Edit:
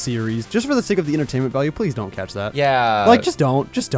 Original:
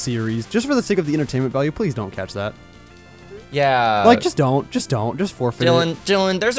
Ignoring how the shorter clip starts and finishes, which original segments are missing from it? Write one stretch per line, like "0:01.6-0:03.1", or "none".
0:02.5-0:03.5

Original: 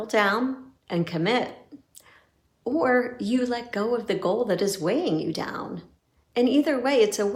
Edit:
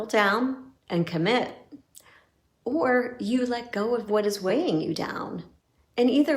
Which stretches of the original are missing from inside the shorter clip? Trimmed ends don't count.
0:04.3-0:04.6

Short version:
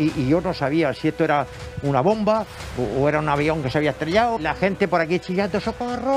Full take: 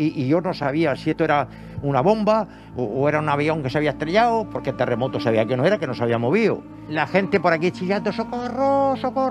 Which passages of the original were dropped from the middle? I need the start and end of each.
0:04.4-0:06.9

